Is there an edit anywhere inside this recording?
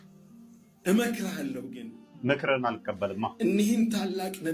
no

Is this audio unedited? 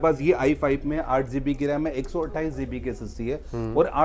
yes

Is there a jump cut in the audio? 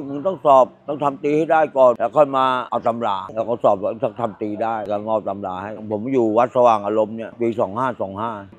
no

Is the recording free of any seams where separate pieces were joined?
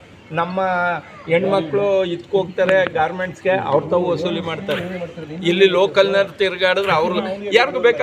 yes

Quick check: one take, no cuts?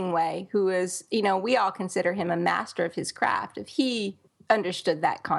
no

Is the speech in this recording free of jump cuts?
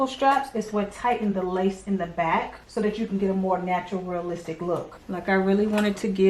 no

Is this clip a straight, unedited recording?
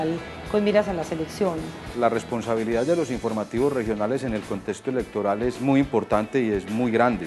no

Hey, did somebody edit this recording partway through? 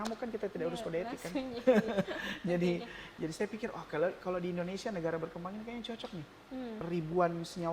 yes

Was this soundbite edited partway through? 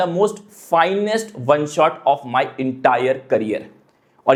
no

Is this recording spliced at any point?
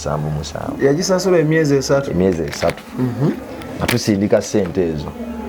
no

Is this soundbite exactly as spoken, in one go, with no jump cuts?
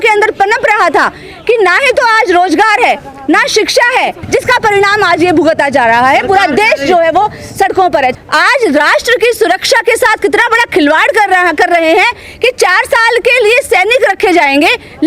no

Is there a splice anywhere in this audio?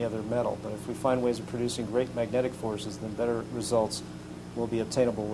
no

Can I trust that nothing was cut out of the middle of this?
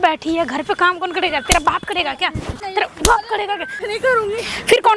no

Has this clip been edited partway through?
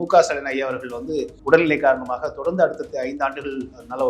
yes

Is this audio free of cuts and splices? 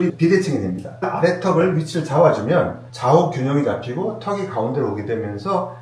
no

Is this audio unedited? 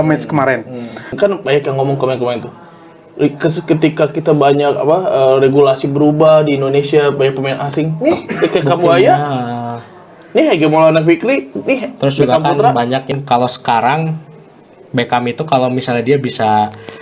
no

